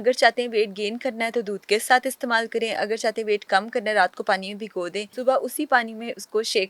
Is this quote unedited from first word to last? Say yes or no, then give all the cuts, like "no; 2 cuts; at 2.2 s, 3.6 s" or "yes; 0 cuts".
no; 1 cut; at 5.1 s